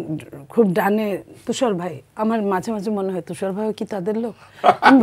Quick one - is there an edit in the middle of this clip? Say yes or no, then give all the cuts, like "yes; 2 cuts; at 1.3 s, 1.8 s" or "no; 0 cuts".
no; 0 cuts